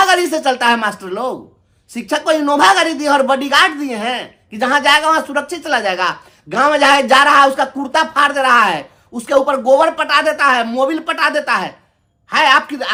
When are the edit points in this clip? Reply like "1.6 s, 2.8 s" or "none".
none